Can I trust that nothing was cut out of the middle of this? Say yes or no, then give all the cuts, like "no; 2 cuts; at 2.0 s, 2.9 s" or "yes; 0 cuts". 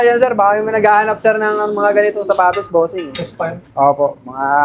yes; 0 cuts